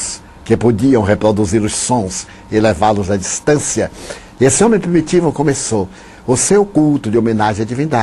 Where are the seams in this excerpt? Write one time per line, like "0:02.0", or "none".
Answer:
0:03.4